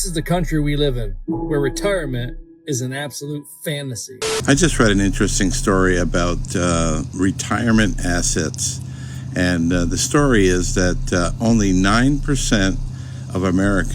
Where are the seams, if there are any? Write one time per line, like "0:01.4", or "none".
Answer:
0:04.2